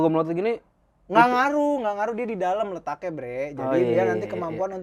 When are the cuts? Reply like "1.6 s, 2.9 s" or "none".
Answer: none